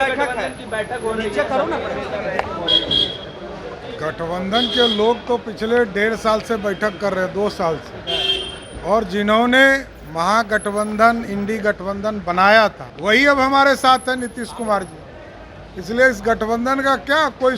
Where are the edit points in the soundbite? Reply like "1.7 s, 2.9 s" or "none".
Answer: 12.9 s